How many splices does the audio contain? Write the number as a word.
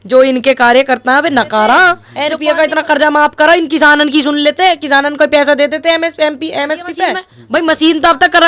two